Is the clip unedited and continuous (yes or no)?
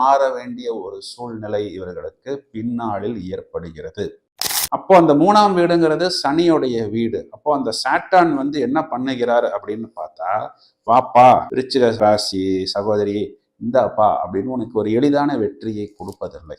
no